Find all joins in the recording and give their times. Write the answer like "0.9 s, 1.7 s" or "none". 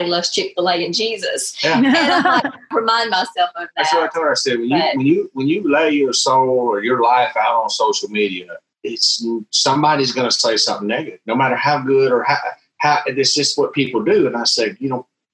2.7 s